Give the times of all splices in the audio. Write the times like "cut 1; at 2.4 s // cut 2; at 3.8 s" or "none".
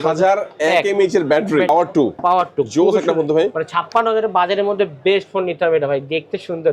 cut 1; at 1.7 s